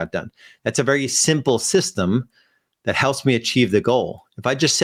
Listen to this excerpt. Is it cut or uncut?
uncut